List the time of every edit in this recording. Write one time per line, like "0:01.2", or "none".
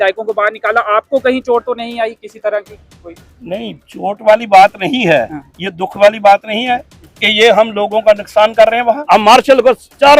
0:09.0

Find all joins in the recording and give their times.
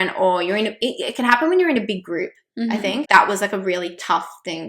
0:03.1

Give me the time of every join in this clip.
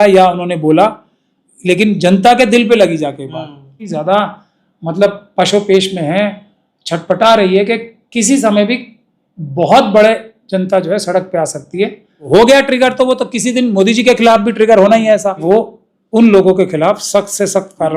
0:03.8
0:12.3
0:15.4

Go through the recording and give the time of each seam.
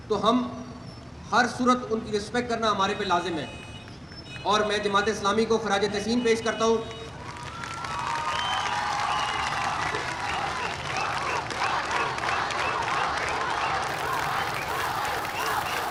none

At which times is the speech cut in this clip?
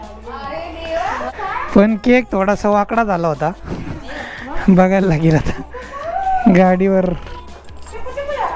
0:01.2

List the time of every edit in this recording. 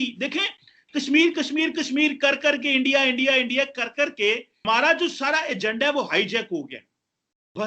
0:04.5

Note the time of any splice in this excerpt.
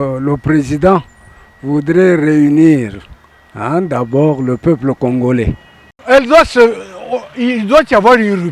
0:05.9

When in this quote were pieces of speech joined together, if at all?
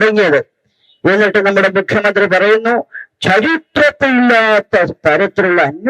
none

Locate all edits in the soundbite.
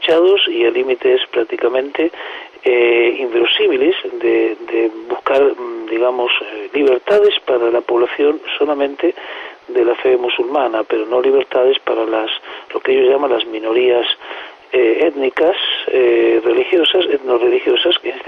0:13.5

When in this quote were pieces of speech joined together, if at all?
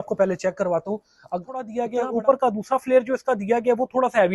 0:01.8

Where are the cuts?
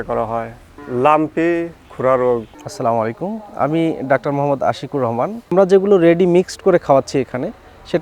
0:02.5
0:05.5

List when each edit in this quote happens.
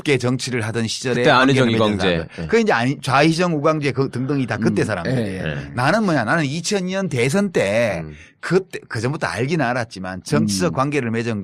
0:05.7

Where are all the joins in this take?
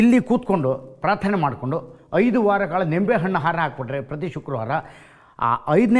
none

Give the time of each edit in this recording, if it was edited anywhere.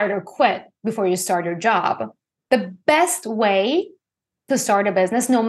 none

